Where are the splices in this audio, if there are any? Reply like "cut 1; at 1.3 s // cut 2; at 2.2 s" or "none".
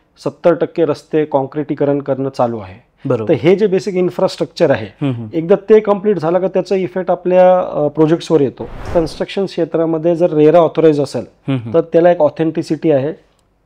cut 1; at 8.9 s